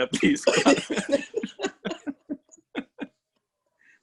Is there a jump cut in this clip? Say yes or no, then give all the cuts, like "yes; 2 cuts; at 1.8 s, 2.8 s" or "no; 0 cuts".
no; 0 cuts